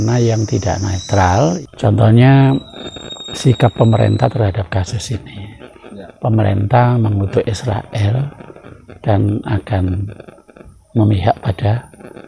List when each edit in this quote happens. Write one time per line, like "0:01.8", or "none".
0:01.6